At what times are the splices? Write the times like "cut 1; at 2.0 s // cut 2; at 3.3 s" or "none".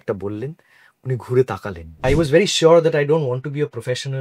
cut 1; at 2.0 s